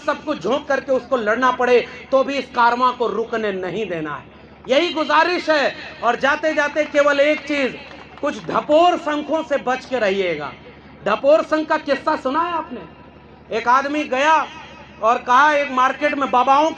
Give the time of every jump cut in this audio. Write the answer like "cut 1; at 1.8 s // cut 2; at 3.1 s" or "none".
none